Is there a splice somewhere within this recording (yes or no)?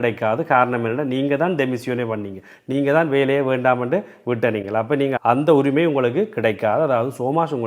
no